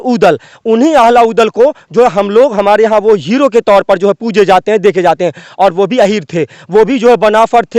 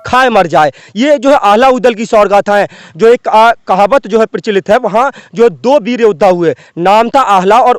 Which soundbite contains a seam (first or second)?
second